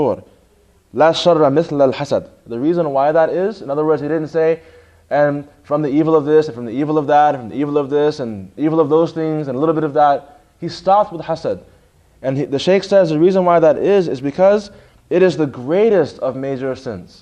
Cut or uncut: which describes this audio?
cut